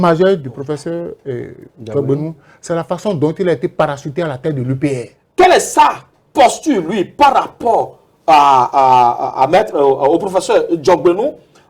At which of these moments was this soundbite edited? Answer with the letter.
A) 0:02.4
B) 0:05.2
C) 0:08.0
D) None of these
B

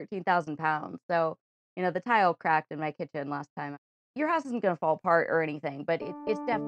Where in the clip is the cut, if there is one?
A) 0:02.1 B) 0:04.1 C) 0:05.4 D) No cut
B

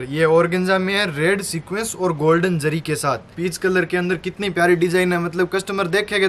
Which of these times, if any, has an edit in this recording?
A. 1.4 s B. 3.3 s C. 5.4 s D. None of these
B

